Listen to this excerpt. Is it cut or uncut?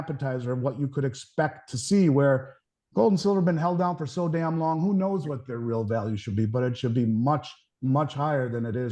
uncut